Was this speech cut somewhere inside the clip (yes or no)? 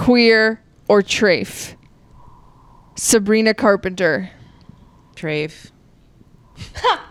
no